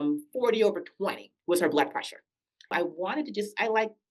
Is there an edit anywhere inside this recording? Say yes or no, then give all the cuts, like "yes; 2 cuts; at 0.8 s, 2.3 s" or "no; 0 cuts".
yes; 1 cut; at 2.7 s